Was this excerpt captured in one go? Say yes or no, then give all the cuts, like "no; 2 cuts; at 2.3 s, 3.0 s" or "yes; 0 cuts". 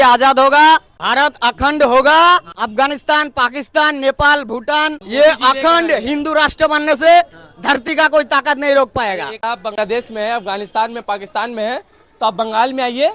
no; 4 cuts; at 1.0 s, 2.6 s, 5.0 s, 9.4 s